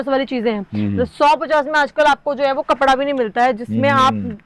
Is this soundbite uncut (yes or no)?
yes